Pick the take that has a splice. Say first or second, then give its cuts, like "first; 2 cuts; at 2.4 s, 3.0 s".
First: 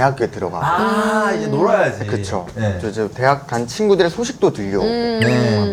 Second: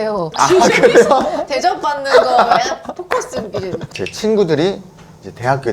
second; 1 cut; at 3.9 s